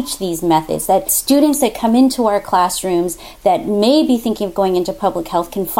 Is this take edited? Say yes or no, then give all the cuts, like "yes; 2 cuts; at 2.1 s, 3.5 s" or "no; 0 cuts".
yes; 1 cut; at 1.1 s